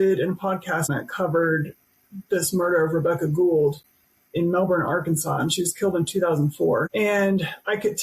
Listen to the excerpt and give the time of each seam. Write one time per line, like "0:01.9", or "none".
0:00.9
0:06.9